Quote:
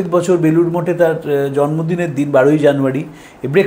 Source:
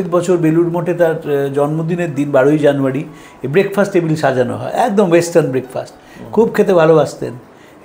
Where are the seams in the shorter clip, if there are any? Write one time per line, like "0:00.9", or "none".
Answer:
none